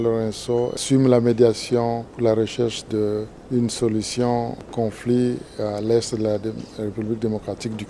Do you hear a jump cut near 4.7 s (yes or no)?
yes